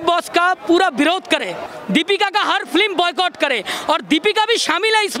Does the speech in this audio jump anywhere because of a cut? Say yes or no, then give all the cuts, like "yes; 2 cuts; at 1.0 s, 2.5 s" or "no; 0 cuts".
yes; 1 cut; at 1.6 s